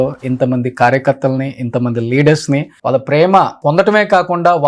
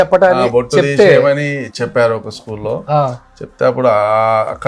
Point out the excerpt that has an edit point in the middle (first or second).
first